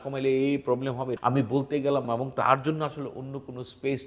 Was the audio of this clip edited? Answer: yes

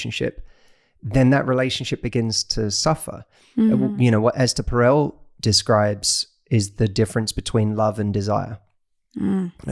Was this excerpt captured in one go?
yes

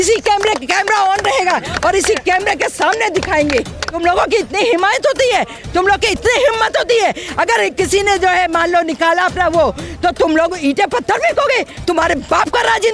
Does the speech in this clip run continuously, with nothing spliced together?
no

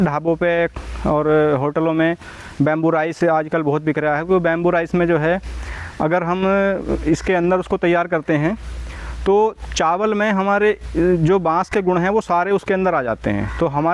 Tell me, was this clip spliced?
no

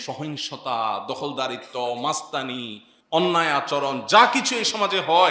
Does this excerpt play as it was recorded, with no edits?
yes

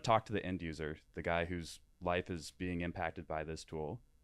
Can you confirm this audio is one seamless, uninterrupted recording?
yes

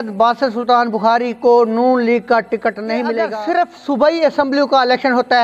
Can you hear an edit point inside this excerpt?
yes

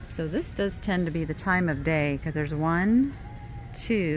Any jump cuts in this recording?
no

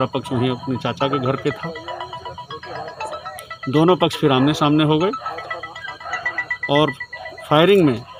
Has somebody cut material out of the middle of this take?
no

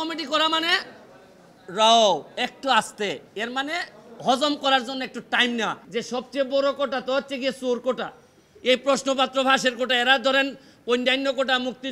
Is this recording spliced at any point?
yes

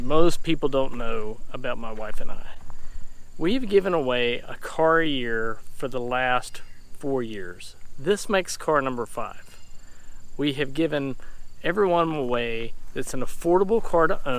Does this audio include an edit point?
no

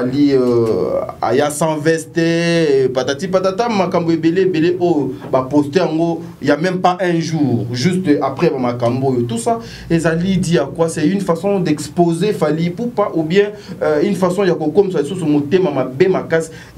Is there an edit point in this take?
no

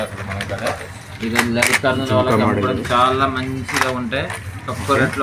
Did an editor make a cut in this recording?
no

